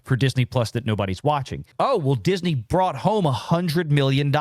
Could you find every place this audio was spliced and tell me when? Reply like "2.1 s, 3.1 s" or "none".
1.7 s